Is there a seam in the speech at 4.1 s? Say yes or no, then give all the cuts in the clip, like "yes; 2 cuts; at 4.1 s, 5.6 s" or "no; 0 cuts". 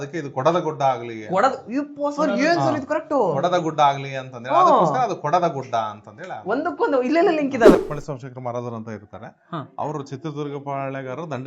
no; 1 cut; at 7.8 s